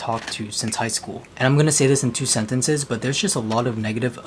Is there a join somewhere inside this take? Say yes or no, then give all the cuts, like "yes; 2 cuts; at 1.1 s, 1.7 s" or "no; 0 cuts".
yes; 1 cut; at 1.3 s